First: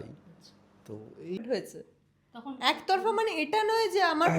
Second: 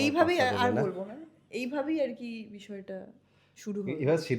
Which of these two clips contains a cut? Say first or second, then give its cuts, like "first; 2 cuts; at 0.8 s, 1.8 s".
first; 1 cut; at 1.4 s